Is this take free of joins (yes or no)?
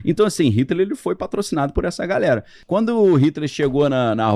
no